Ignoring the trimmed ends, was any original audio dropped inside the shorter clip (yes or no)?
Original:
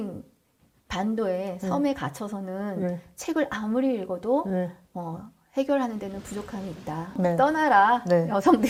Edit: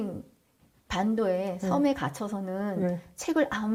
no